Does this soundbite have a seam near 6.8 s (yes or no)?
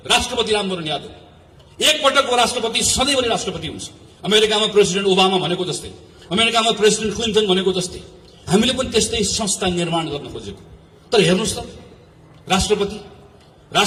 no